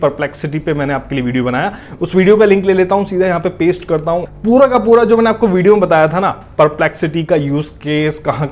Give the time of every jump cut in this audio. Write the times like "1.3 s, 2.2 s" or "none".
4.3 s